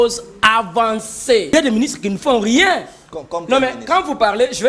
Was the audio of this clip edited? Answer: yes; 1 cut; at 1.5 s

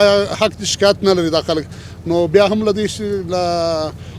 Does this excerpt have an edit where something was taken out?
no; 0 cuts

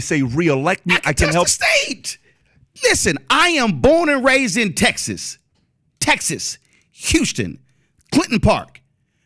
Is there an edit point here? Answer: no; 0 cuts

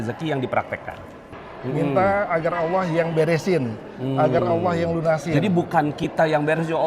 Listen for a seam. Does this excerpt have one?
yes; 1 cut; at 1.4 s

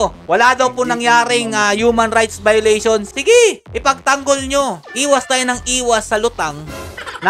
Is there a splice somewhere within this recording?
yes; 1 cut; at 4.8 s

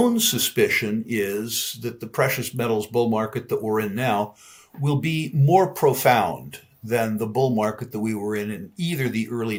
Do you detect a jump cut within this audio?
no; 0 cuts

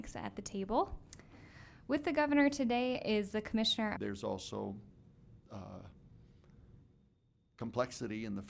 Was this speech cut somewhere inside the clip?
no; 0 cuts

